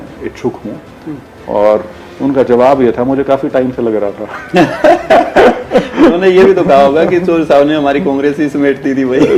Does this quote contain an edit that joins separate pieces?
no; 0 cuts

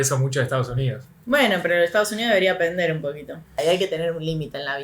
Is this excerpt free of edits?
no; 1 cut; at 3.5 s

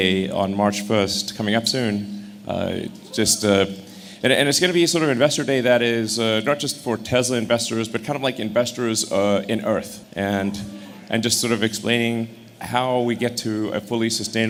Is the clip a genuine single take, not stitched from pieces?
yes; 0 cuts

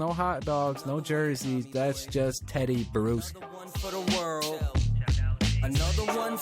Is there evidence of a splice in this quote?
yes; 1 cut; at 3.8 s

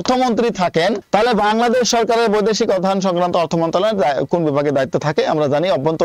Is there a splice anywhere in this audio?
yes; 1 cut; at 1.0 s

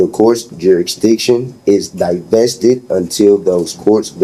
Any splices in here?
no; 0 cuts

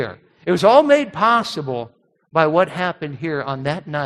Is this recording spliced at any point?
no; 0 cuts

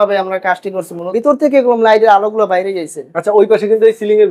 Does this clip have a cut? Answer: yes; 1 cut; at 1.0 s

